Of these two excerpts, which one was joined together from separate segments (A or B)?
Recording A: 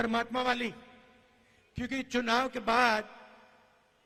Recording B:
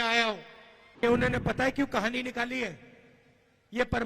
B